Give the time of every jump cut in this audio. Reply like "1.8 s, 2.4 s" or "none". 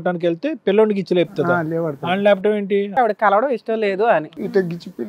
2.9 s, 4.3 s